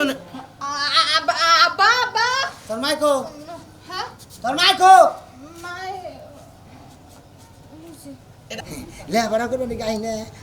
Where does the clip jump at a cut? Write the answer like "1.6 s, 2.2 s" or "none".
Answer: 8.4 s